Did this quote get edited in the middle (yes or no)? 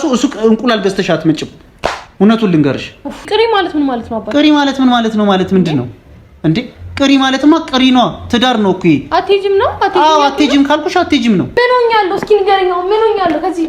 yes